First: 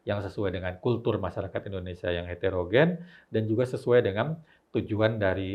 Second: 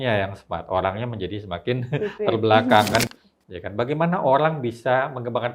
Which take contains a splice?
second; 1 cut; at 3.1 s

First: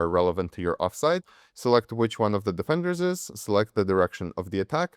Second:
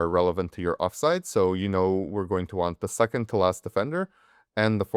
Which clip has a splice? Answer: first; 1 cut; at 1.2 s

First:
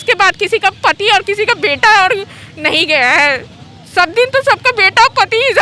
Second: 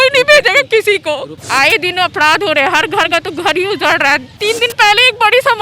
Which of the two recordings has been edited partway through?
second; 2 cuts; at 1.3 s, 4.4 s

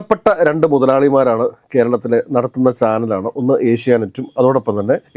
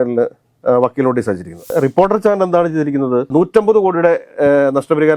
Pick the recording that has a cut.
second; 2 cuts; at 1.7 s, 3.3 s

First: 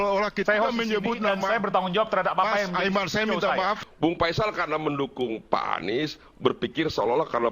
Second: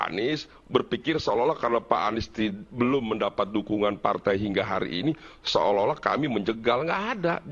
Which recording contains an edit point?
first; 1 cut; at 3.8 s

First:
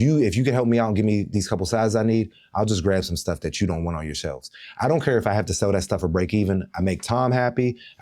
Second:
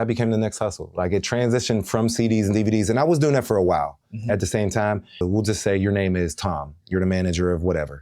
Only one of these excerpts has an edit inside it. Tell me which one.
second; 1 cut; at 5.2 s

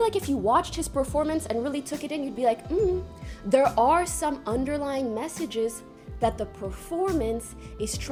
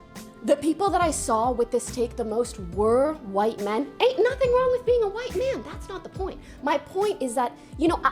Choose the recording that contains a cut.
second; 1 cut; at 5.6 s

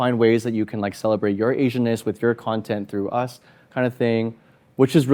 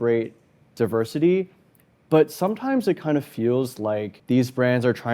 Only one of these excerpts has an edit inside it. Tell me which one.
second; 1 cut; at 4.1 s

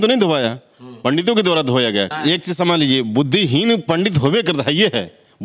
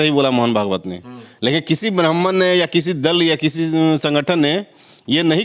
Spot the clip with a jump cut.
first; 1 cut; at 2.1 s

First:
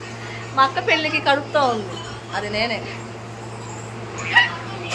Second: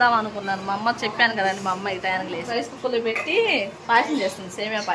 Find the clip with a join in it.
second; 1 cut; at 2.5 s

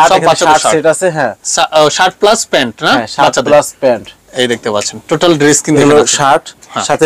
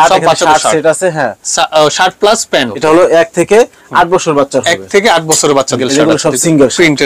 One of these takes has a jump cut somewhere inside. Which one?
second; 2 cuts; at 2.7 s, 5.8 s

